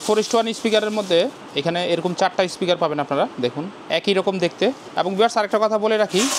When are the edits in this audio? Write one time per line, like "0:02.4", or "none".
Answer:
0:03.7
0:04.8